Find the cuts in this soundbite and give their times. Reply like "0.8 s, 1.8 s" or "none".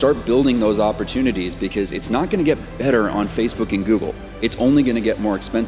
none